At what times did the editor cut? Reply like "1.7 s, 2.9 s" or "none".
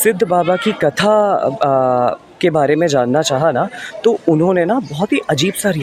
none